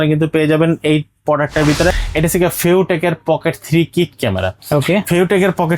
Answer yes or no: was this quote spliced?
yes